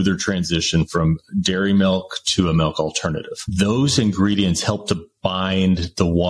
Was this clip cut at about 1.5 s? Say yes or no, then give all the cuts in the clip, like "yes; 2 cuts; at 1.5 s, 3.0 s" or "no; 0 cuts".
no; 1 cut; at 3.4 s